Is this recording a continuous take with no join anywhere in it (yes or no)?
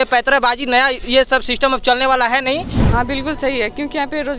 no